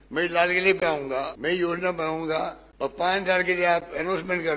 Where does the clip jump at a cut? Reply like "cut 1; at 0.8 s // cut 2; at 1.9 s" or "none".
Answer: cut 1; at 1.3 s // cut 2; at 2.6 s